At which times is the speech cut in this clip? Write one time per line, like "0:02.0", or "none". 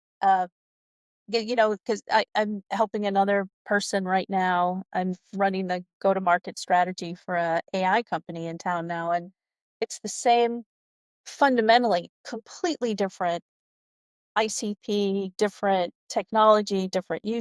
0:14.2
0:16.0